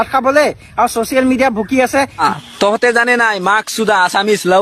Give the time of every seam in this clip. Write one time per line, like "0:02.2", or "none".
0:02.2